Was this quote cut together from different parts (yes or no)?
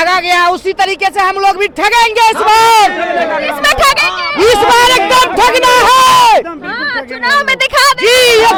no